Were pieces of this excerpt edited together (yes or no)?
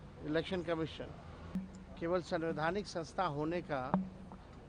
yes